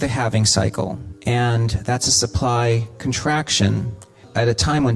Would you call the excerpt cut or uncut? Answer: cut